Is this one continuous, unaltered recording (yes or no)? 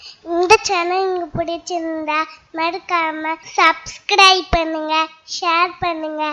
no